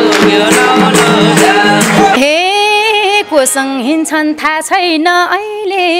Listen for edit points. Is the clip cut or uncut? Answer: cut